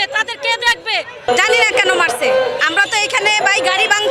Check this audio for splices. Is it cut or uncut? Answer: cut